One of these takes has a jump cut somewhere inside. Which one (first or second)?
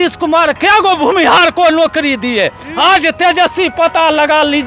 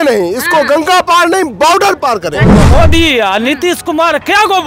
second